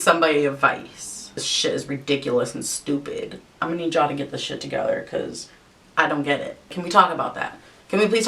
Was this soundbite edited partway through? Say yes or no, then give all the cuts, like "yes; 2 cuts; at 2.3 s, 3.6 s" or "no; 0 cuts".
yes; 3 cuts; at 1.3 s, 3.6 s, 6.7 s